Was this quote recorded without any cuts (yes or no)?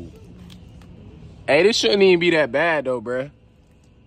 no